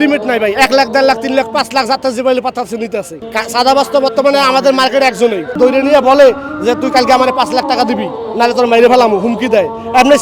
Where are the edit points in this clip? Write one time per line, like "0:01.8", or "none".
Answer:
0:03.2
0:05.5